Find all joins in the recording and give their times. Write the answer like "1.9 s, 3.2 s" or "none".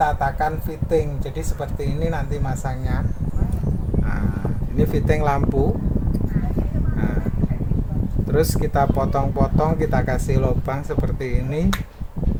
none